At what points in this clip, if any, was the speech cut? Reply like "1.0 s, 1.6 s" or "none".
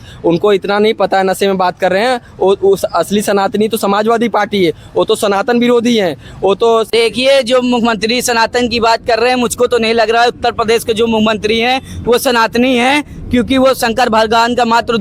6.9 s